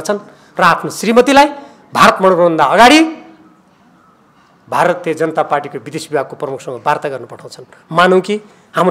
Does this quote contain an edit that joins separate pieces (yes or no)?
no